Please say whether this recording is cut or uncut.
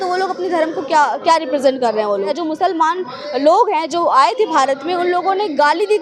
cut